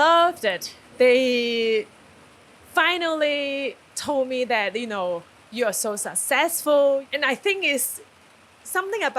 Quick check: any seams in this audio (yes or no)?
yes